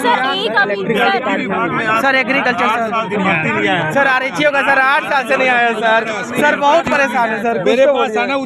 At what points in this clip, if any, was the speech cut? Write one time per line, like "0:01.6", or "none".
none